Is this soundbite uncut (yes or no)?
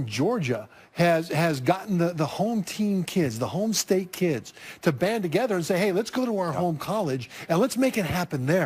no